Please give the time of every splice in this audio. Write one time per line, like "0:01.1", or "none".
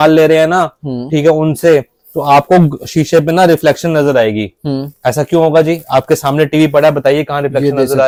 none